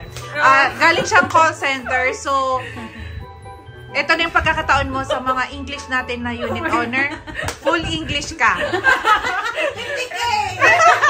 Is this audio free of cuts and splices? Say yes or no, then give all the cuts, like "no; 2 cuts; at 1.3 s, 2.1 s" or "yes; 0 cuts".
yes; 0 cuts